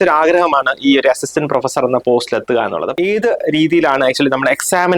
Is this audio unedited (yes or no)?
no